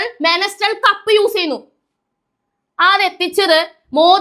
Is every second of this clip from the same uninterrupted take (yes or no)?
yes